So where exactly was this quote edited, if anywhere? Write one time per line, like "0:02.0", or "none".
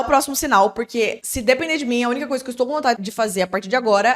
0:01.3
0:03.0